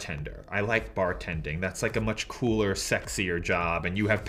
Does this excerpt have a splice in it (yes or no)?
no